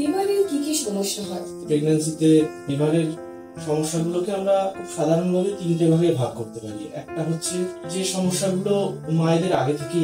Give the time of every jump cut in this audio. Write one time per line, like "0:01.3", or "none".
0:01.6
0:02.7
0:04.8
0:07.8